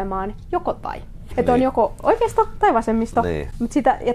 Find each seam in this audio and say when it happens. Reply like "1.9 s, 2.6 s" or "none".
1.3 s